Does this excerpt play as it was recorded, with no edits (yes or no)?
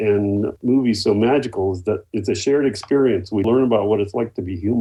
yes